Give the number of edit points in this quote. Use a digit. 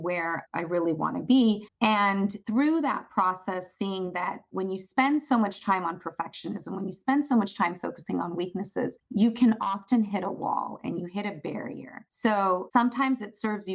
1